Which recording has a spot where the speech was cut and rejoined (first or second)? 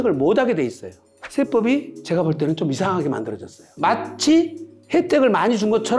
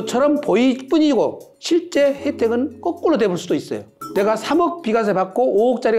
first